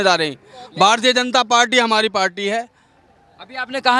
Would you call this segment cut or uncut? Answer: uncut